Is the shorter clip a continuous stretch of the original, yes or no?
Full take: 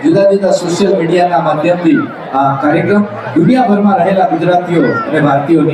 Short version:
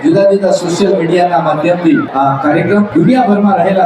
no